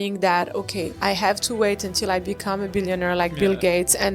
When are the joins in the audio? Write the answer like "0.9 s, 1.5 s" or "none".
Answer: 1.0 s